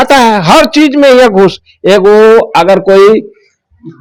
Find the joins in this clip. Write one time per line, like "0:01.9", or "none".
none